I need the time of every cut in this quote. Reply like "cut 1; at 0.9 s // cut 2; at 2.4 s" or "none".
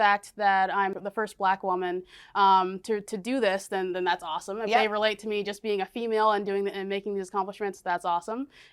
cut 1; at 1.0 s